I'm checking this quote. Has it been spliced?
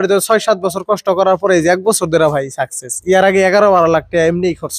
no; 0 cuts

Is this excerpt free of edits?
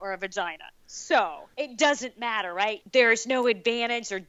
no; 2 cuts; at 1.4 s, 2.8 s

